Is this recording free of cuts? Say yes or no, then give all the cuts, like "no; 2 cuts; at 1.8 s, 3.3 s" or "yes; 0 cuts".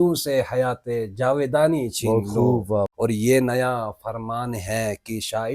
no; 1 cut; at 2.9 s